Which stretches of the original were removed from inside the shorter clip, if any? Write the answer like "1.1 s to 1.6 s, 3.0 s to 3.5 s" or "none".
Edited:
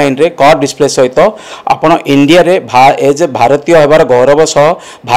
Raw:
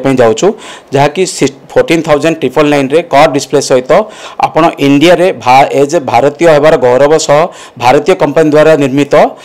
none